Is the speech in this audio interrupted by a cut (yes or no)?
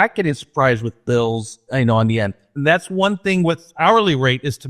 yes